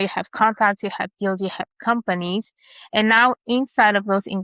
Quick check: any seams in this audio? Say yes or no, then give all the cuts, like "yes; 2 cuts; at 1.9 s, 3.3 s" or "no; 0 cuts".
no; 0 cuts